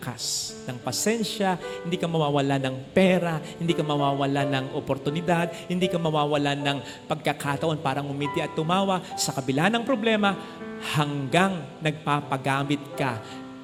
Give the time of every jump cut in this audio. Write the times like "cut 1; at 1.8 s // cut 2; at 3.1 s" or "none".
none